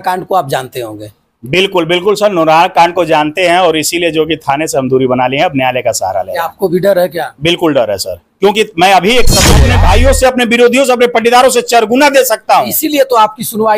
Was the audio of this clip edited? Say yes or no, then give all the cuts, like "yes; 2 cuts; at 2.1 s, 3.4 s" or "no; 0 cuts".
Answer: yes; 1 cut; at 9.6 s